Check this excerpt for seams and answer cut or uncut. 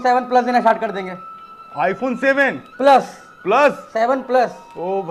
uncut